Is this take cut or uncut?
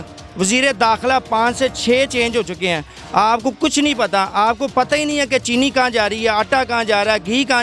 uncut